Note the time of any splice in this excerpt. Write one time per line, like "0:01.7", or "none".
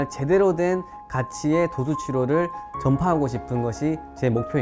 none